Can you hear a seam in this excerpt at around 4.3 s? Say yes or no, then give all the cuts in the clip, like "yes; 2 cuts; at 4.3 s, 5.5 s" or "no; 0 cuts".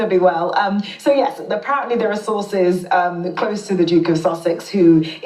yes; 1 cut; at 4.3 s